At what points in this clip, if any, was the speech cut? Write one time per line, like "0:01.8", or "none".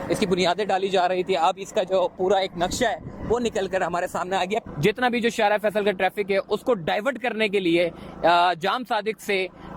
0:04.6

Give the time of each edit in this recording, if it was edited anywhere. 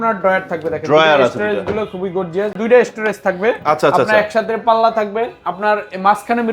0:02.6

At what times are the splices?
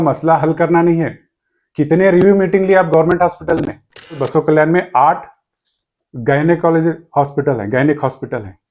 0:04.2

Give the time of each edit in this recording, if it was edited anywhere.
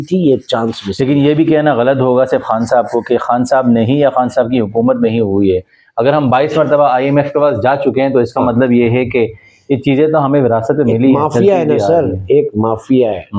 none

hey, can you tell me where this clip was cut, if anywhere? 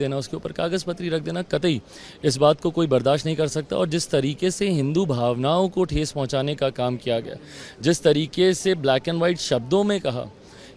none

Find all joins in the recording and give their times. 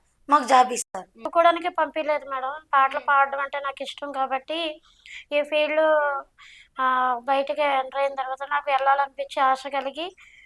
0:01.3

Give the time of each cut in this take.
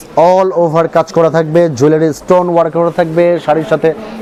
none

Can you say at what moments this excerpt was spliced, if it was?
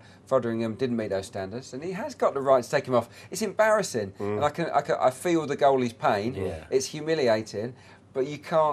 0:03.7

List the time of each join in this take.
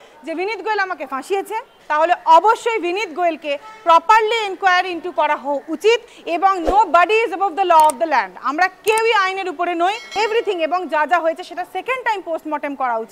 0:01.8
0:06.2
0:10.0

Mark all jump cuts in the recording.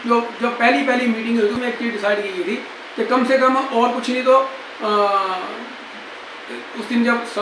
0:01.6

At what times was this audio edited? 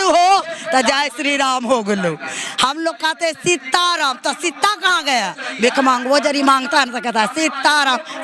none

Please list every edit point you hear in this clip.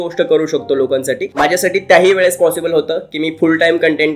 0:01.3

